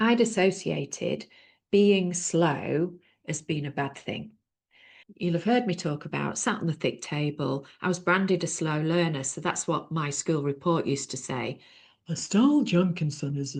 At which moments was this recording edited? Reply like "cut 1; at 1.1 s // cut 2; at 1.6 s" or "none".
none